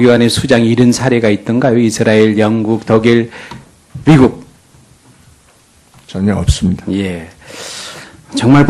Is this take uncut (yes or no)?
no